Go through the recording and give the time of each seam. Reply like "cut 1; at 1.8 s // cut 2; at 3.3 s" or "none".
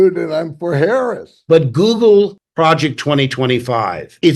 cut 1; at 1.3 s